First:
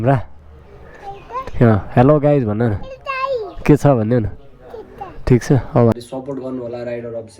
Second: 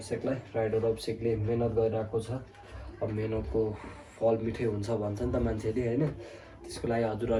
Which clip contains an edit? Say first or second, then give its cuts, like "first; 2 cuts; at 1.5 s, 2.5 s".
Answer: first; 1 cut; at 5.9 s